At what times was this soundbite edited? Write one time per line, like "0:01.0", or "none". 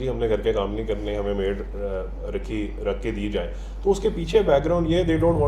none